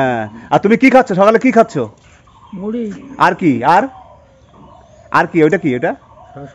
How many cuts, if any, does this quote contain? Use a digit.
0